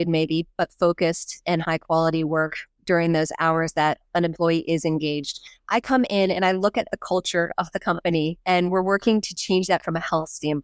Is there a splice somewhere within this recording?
yes; 1 cut; at 5.5 s

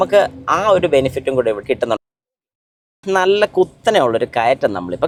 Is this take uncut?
yes; 0 cuts

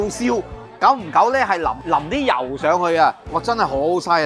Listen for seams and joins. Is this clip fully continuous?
no; 2 cuts; at 1.8 s, 3.3 s

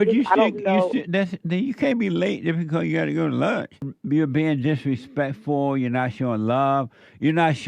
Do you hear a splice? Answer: yes; 1 cut; at 3.9 s

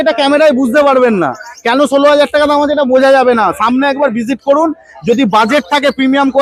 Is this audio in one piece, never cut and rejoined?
yes; 0 cuts

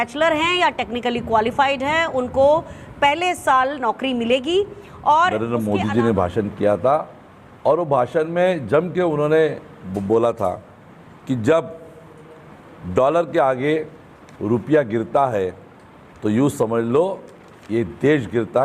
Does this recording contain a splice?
yes; 1 cut; at 5.4 s

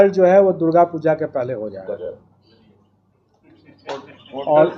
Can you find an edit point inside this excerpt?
no; 0 cuts

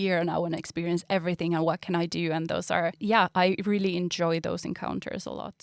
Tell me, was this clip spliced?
yes; 1 cut; at 3.0 s

